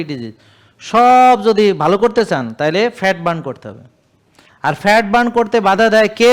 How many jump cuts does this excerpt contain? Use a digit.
0